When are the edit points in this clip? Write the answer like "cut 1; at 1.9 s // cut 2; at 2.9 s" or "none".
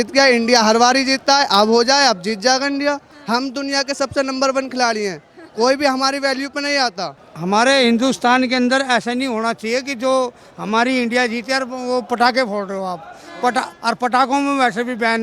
cut 1; at 3.1 s // cut 2; at 7.3 s